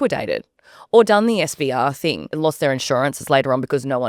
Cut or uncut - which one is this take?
cut